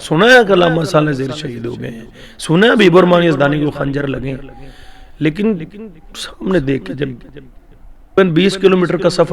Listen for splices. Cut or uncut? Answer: cut